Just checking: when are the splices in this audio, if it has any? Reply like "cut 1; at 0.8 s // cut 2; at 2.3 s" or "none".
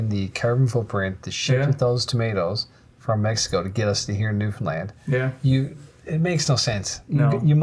none

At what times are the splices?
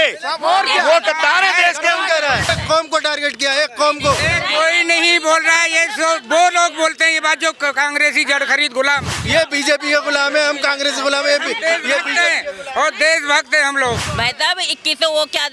cut 1; at 2.5 s // cut 2; at 4.2 s // cut 3; at 9.2 s // cut 4; at 14.1 s

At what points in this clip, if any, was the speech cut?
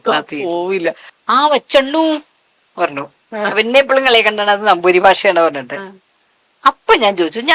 cut 1; at 1.1 s

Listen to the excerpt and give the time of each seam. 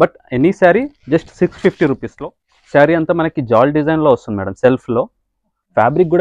cut 1; at 2.1 s

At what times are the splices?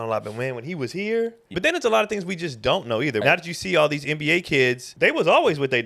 cut 1; at 1.5 s // cut 2; at 3.2 s // cut 3; at 4.9 s

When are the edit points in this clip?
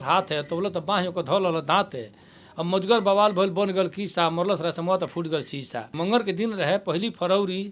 cut 1; at 5.9 s

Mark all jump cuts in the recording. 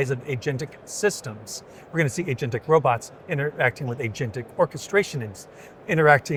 none

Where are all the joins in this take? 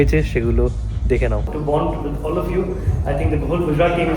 cut 1; at 1.5 s

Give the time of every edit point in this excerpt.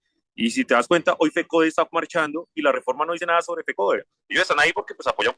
cut 1; at 4.1 s

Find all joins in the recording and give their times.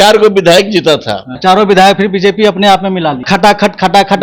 cut 1; at 1.3 s // cut 2; at 3.2 s

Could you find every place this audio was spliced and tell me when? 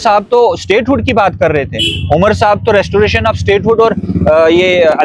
none

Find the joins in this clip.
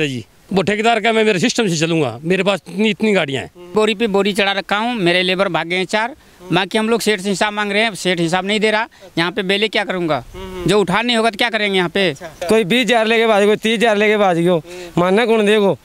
cut 1; at 3.7 s // cut 2; at 12.3 s

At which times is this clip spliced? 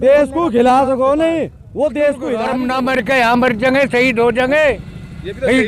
cut 1; at 2.5 s

